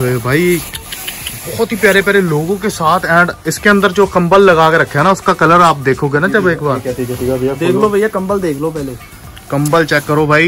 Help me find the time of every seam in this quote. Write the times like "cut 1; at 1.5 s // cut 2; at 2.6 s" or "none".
cut 1; at 6.8 s